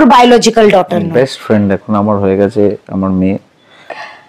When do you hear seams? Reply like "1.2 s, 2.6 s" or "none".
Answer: 1.0 s